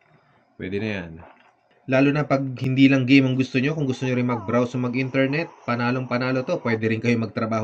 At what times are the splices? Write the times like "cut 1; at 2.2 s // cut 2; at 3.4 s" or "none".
cut 1; at 1.8 s